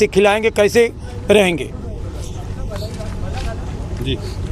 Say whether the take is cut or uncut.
uncut